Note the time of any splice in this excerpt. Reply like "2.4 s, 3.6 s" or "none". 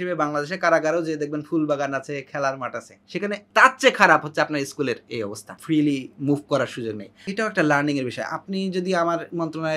3.2 s, 5.6 s, 7.3 s